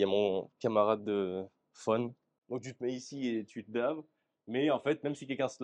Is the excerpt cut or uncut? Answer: cut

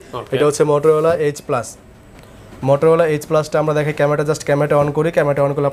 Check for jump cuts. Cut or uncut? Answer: uncut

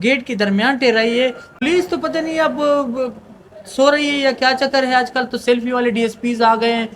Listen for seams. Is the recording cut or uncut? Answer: cut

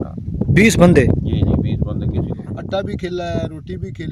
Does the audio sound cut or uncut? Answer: cut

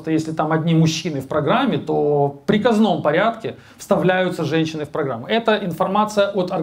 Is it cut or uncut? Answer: uncut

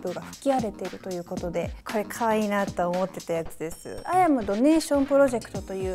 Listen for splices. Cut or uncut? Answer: cut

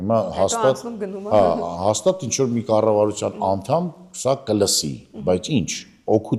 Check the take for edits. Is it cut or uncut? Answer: uncut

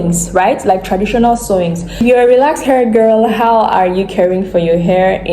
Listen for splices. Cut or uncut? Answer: cut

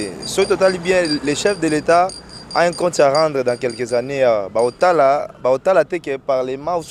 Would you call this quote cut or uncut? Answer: uncut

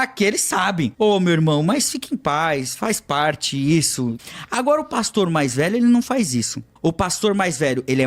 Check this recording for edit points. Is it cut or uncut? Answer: cut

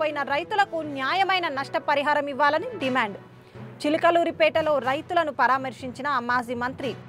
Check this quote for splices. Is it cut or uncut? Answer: uncut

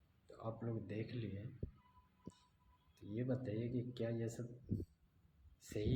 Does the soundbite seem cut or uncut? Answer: cut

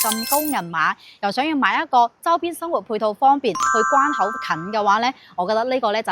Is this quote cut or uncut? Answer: cut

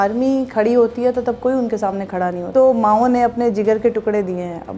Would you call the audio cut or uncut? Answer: cut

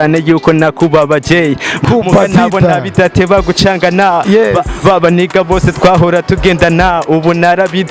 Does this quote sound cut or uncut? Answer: cut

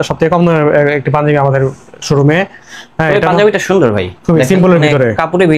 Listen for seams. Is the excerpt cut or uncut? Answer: uncut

